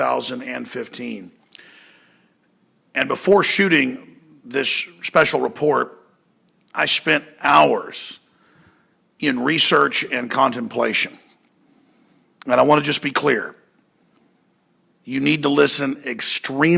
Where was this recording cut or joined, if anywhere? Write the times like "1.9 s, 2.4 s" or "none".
8.9 s